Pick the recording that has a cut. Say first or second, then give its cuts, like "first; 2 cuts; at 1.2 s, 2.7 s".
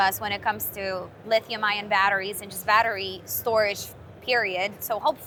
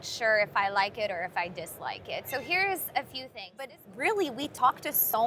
second; 1 cut; at 3.8 s